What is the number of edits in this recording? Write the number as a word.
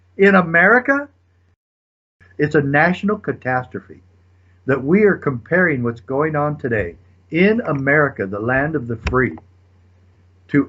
one